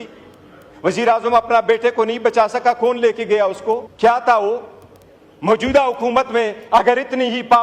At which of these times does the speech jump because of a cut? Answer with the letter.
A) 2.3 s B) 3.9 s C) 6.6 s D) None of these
B